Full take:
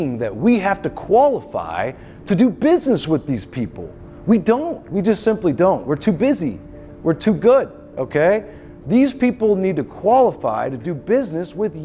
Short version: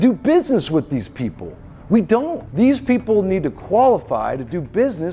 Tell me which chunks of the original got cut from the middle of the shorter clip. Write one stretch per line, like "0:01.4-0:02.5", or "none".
0:04.8-0:08.7